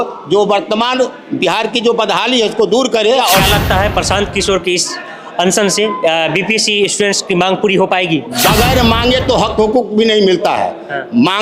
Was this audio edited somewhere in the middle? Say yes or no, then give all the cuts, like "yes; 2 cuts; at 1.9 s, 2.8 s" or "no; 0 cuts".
yes; 2 cuts; at 3.2 s, 8.3 s